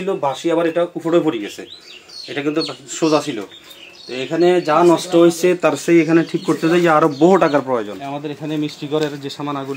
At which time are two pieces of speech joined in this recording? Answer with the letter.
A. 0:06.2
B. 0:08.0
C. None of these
B